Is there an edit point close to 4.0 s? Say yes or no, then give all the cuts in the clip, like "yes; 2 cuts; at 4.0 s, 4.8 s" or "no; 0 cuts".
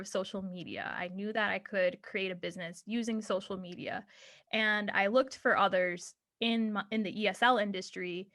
no; 0 cuts